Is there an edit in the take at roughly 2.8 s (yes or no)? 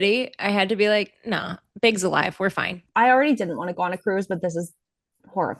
yes